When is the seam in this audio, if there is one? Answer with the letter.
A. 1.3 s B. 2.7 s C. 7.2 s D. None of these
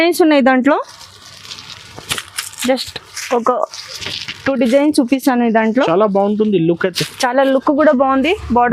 D